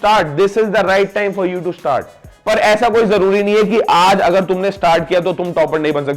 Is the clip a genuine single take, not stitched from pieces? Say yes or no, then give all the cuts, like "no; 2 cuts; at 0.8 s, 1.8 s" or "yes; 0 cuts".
no; 1 cut; at 2.3 s